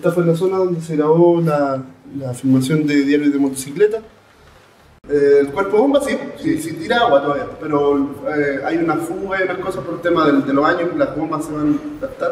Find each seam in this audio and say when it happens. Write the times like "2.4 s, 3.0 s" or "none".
4.9 s